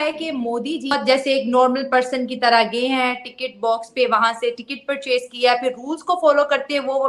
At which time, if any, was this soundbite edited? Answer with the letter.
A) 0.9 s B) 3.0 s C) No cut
A